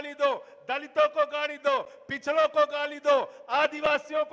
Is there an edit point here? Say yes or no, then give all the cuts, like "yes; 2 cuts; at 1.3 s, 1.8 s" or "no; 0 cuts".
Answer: no; 0 cuts